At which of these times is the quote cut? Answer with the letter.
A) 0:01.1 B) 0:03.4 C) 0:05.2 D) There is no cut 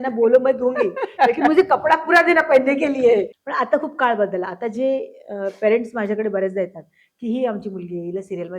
B